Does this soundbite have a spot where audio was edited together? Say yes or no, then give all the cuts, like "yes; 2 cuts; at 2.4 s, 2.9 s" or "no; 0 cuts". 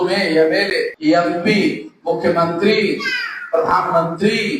yes; 2 cuts; at 0.9 s, 1.9 s